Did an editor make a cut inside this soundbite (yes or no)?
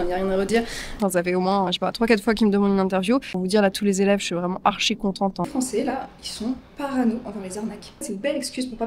yes